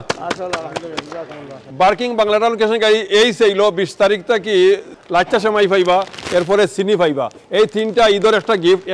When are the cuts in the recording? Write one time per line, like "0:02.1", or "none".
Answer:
0:01.6
0:05.0